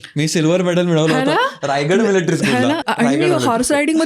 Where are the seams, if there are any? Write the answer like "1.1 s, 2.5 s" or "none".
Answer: 2.8 s

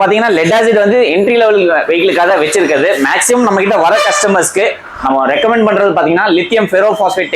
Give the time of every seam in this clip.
none

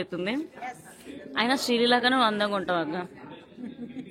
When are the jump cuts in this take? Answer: none

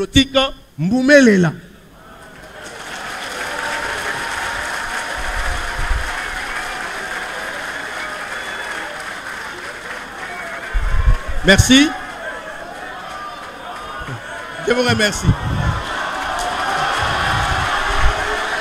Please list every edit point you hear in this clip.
none

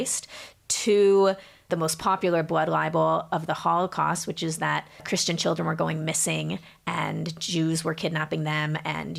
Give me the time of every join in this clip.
1.6 s, 5.0 s

